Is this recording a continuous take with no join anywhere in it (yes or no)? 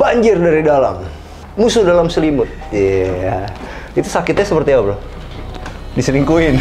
yes